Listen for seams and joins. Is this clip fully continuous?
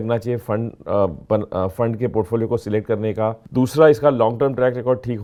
yes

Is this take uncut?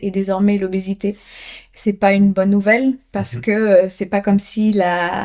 yes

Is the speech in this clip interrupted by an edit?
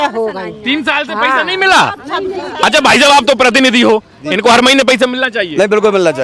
no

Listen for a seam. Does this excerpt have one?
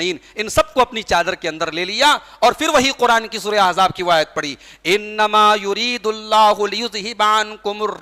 no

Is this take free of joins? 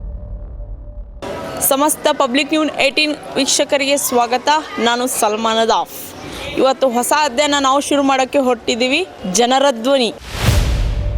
no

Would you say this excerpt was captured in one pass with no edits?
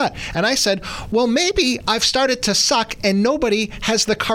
yes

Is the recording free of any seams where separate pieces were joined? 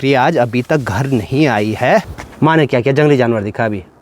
no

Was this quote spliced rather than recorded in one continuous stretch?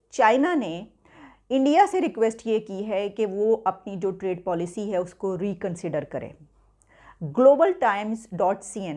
no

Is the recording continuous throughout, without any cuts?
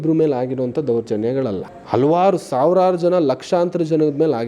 no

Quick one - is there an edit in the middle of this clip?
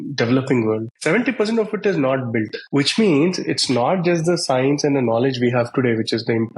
yes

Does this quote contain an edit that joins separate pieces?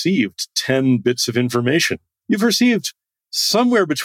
no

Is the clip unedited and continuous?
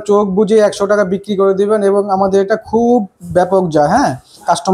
yes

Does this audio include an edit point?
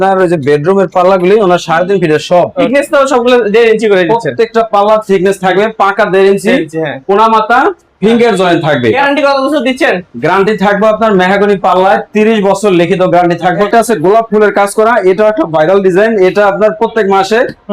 yes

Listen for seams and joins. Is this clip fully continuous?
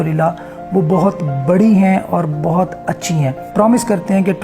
no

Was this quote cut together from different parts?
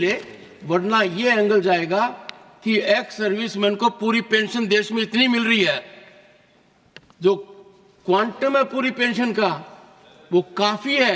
no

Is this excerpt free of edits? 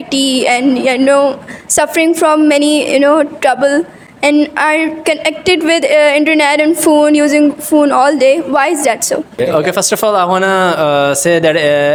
yes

